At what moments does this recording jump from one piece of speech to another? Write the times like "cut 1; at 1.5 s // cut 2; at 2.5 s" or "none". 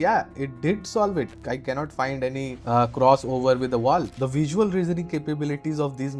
cut 1; at 1.3 s // cut 2; at 2.6 s // cut 3; at 4.2 s